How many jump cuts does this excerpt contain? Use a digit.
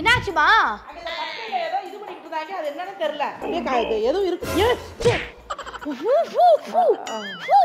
1